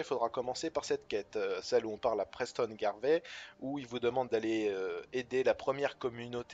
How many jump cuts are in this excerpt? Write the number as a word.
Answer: one